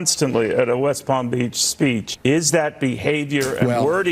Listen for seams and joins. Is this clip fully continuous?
no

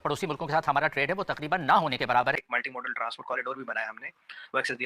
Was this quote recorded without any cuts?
no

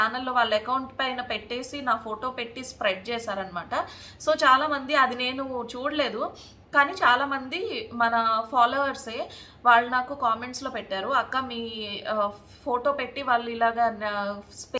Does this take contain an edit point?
no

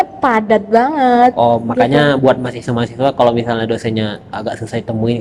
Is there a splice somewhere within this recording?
no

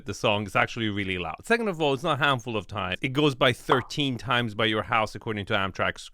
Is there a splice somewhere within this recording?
yes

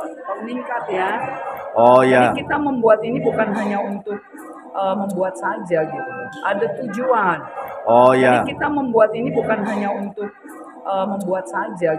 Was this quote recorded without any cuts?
no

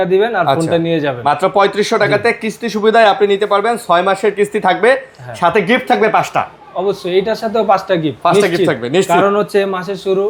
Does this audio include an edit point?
no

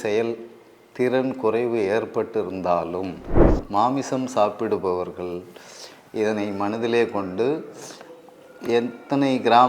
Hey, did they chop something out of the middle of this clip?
yes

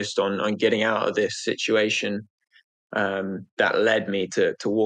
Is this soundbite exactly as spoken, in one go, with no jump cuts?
yes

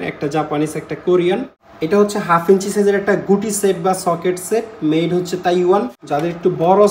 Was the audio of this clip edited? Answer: yes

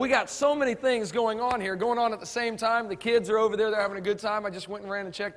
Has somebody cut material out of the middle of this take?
no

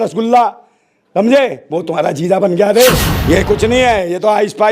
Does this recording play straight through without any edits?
no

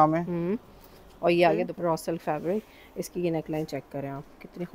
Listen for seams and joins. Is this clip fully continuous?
no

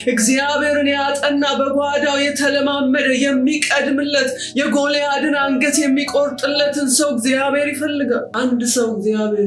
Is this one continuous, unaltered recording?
no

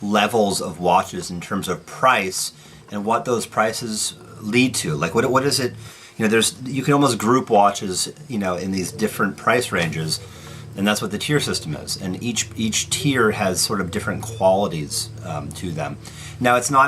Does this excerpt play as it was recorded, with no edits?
no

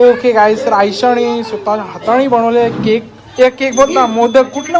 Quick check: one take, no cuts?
yes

